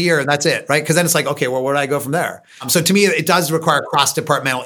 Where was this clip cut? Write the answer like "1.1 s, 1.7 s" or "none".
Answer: 2.7 s